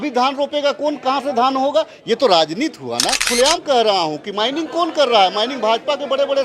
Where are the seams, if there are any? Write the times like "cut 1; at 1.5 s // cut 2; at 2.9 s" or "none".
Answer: cut 1; at 3.2 s

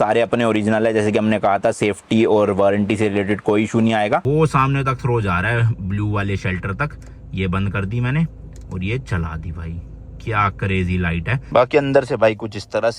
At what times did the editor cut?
cut 1; at 4.2 s // cut 2; at 11.4 s

